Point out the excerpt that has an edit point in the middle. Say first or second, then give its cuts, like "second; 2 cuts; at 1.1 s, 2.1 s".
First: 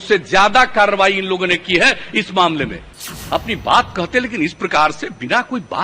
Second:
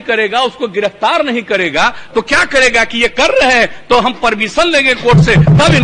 first; 1 cut; at 2.9 s